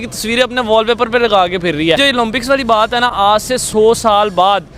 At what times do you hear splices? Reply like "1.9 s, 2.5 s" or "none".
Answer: 2.0 s